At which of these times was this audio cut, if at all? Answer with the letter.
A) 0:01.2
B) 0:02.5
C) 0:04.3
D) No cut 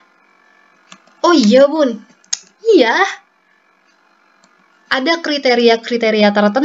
D